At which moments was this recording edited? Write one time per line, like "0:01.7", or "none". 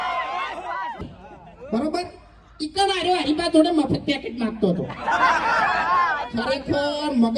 0:01.0